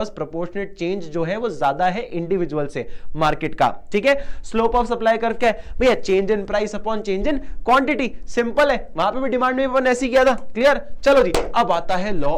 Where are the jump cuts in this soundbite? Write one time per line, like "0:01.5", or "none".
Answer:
none

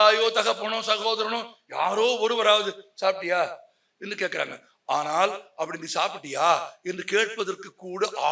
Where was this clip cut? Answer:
none

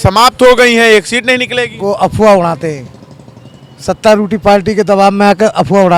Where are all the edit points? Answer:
none

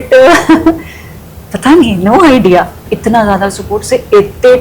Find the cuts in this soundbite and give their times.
0:02.9

